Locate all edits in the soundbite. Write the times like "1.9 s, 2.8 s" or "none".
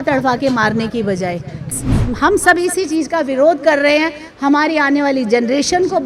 1.7 s